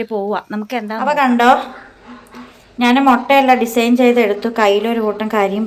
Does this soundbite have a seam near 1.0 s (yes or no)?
yes